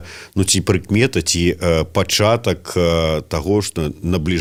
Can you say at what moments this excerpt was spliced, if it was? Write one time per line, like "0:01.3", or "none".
none